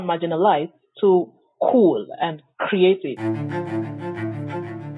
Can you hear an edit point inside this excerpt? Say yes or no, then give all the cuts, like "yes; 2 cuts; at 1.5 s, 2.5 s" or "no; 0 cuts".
yes; 1 cut; at 3.1 s